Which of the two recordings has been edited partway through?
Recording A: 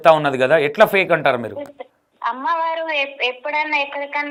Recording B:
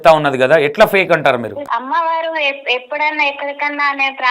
B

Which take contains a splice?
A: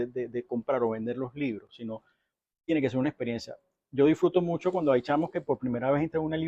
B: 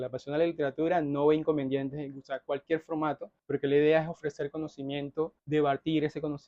B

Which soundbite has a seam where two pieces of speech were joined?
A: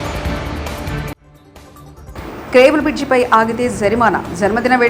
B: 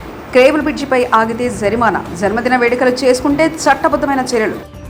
A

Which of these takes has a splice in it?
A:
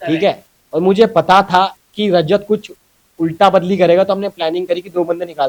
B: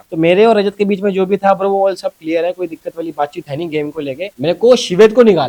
B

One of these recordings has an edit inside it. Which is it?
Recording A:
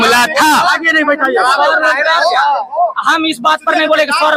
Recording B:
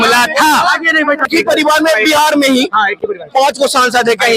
B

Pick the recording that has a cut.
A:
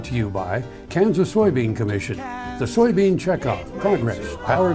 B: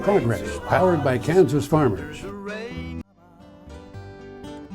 B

